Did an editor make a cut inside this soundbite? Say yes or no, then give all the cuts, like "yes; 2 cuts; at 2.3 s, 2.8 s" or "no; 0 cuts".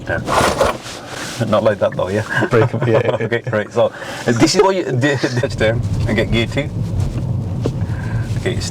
yes; 2 cuts; at 0.9 s, 5.4 s